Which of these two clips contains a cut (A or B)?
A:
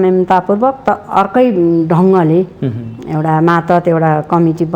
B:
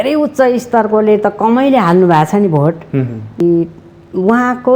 B